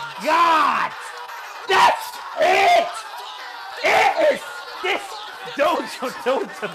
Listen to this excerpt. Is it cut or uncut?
uncut